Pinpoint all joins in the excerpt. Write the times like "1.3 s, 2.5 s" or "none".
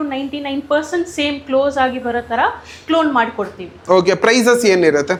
none